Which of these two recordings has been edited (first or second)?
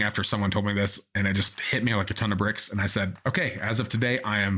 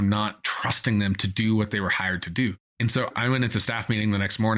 second